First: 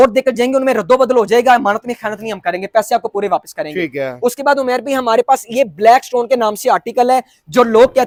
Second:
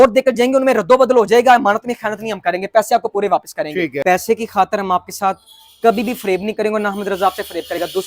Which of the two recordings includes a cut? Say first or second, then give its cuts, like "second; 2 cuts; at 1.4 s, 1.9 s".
second; 1 cut; at 4.0 s